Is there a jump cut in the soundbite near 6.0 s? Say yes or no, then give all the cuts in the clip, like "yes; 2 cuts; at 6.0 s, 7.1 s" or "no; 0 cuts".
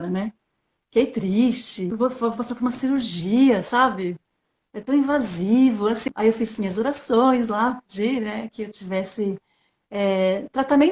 yes; 2 cuts; at 1.9 s, 6.0 s